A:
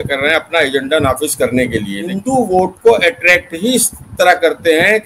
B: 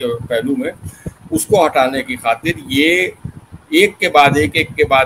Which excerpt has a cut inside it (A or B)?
A